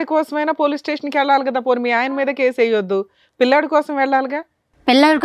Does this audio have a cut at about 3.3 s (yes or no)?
no